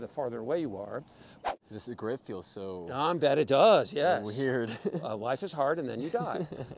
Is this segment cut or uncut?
cut